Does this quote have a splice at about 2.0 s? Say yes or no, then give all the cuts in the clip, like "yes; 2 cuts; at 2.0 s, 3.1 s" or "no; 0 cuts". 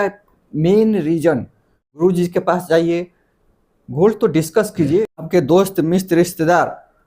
yes; 2 cuts; at 2.0 s, 5.0 s